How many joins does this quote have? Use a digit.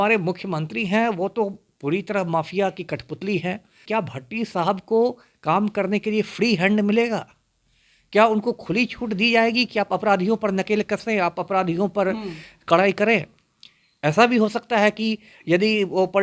1